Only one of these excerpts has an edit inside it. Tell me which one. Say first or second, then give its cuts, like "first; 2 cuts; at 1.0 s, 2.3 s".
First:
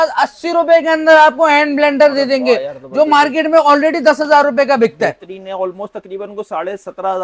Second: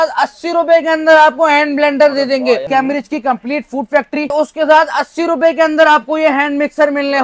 second; 2 cuts; at 2.7 s, 4.3 s